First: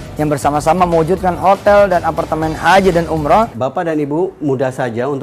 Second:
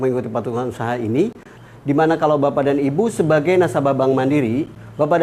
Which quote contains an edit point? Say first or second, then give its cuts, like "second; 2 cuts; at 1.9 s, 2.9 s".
first; 1 cut; at 3.5 s